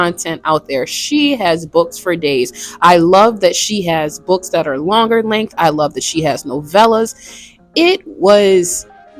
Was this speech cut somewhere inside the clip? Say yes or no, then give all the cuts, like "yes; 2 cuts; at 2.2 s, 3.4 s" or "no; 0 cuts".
no; 0 cuts